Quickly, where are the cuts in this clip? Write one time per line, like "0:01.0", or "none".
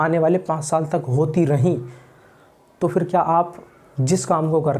none